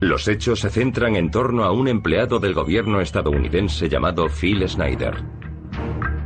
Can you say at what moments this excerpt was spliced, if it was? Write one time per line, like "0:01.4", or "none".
none